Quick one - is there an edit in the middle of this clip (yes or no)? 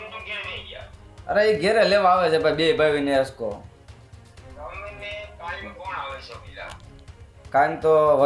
no